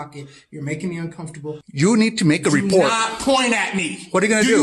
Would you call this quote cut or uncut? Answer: cut